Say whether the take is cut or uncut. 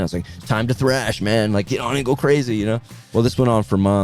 cut